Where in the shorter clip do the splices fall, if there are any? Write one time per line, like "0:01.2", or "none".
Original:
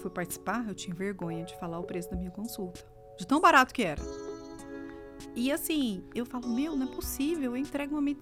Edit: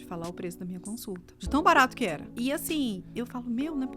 0:01.3
0:02.2